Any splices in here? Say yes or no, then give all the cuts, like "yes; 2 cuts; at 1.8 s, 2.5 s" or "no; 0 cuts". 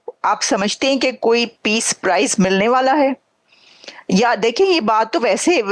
no; 0 cuts